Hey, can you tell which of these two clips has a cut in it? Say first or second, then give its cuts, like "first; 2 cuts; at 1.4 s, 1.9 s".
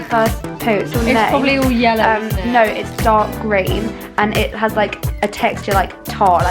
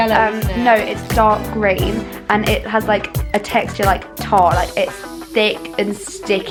first; 1 cut; at 0.9 s